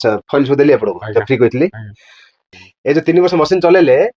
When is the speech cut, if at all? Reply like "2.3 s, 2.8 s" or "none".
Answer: 2.5 s